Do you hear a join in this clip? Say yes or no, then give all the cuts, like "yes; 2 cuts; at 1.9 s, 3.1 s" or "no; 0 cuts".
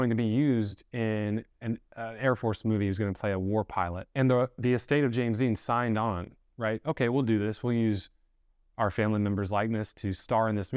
yes; 1 cut; at 4.0 s